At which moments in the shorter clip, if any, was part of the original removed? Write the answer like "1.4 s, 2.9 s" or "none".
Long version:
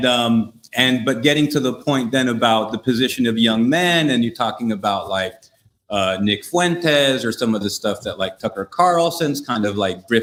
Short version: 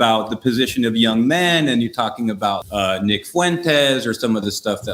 2.6 s